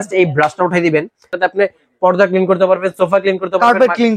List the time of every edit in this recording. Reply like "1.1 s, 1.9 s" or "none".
1.3 s